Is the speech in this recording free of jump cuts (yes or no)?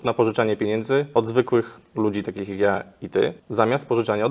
no